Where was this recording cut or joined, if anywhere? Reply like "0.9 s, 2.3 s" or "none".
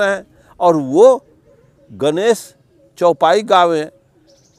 none